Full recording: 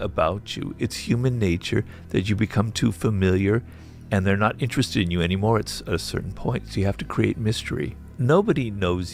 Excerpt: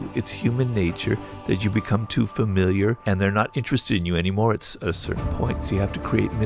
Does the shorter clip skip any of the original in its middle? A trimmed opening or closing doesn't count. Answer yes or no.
yes